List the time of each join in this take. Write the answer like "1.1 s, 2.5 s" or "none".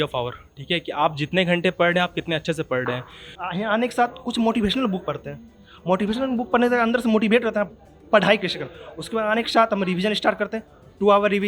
3.3 s